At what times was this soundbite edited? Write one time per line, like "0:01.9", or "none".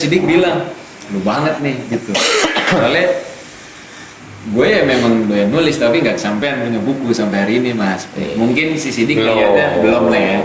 none

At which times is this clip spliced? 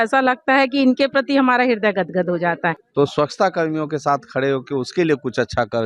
0:02.8

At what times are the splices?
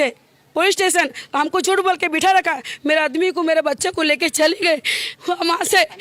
none

